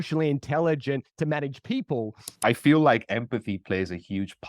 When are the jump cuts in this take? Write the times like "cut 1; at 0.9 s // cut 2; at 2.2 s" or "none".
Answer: cut 1; at 2.2 s